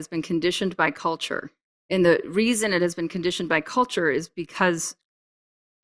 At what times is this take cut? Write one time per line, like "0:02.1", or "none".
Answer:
none